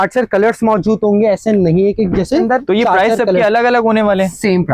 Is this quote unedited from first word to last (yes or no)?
no